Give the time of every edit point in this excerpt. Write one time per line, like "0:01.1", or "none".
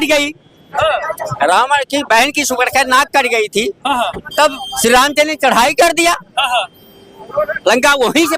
none